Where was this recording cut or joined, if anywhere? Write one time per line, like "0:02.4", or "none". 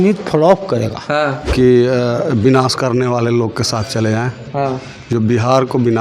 0:01.4